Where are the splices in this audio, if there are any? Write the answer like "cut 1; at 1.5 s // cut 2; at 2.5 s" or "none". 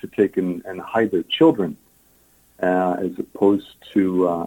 none